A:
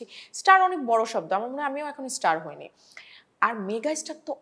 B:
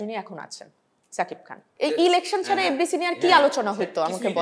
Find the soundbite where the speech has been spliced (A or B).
B